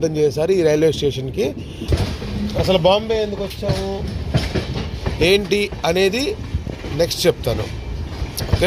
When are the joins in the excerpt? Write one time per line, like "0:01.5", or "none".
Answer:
0:01.8